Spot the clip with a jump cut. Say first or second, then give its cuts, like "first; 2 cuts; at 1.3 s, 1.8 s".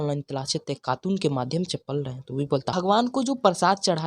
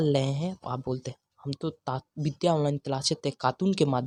first; 1 cut; at 2.7 s